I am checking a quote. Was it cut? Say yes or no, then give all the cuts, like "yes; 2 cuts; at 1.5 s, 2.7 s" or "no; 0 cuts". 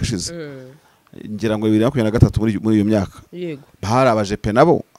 no; 0 cuts